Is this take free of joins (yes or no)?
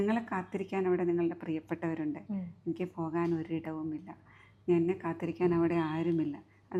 yes